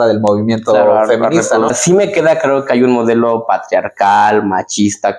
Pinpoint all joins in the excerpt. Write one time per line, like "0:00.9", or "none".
0:01.8